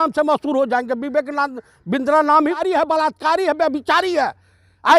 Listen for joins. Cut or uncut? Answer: cut